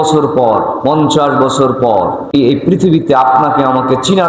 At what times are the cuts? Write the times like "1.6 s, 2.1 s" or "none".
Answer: 2.3 s